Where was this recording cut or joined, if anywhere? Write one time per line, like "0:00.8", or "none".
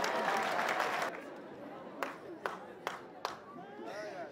0:01.1